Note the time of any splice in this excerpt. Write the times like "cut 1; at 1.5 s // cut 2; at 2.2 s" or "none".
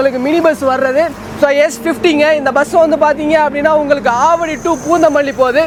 none